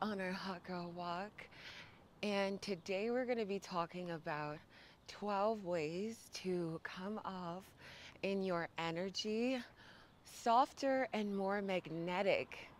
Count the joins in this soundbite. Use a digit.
0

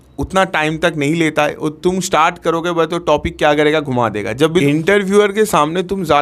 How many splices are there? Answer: 1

